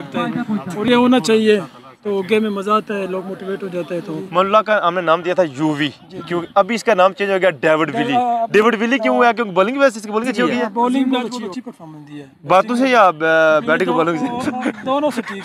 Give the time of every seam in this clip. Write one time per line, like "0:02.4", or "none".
0:04.3
0:11.1